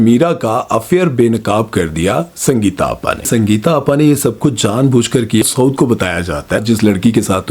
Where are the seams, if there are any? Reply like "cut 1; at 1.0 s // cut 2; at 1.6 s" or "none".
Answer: cut 1; at 3.3 s // cut 2; at 5.4 s // cut 3; at 6.6 s